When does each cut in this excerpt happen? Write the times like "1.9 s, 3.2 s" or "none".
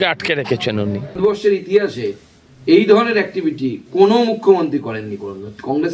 1.1 s